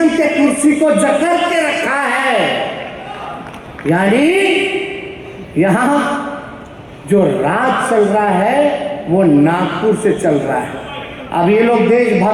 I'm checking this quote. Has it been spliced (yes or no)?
no